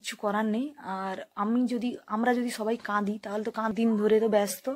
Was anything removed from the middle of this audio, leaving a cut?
yes; 1 cut; at 3.7 s

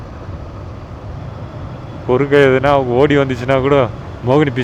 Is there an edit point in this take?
yes; 1 cut; at 1.2 s

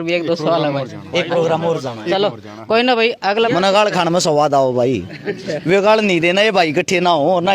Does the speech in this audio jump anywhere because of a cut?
yes; 1 cut; at 3.5 s

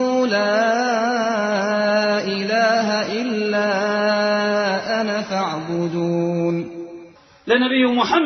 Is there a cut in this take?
no; 0 cuts

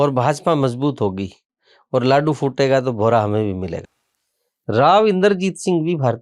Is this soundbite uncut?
no; 1 cut; at 3.9 s

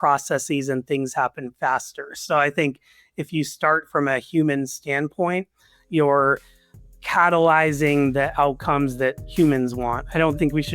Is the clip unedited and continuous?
yes; 0 cuts

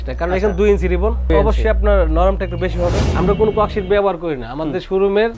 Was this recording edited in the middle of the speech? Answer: yes; 2 cuts; at 1.3 s, 3.0 s

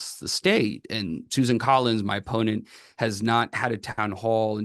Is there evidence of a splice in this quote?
no; 0 cuts

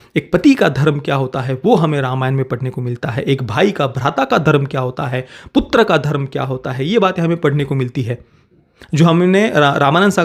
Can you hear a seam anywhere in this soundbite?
no; 0 cuts

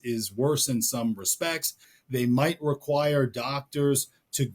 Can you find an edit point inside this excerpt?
yes; 1 cut; at 1.9 s

